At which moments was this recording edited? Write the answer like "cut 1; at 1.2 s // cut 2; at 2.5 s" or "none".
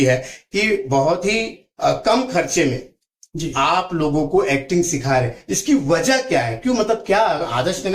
none